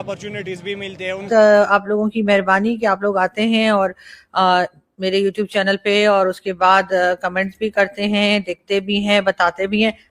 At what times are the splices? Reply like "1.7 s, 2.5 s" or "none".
1.2 s